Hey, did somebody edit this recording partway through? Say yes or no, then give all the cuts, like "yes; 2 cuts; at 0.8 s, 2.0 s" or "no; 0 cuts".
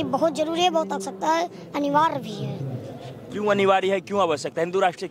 no; 0 cuts